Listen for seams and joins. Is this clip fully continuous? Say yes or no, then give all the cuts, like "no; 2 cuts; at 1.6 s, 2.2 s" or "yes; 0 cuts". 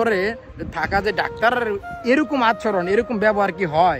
yes; 0 cuts